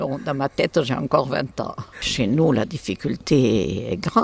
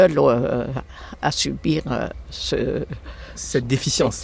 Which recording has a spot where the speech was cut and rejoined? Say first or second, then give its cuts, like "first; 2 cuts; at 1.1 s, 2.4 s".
first; 1 cut; at 2.0 s